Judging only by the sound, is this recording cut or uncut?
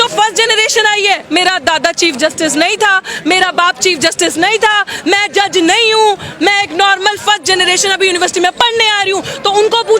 cut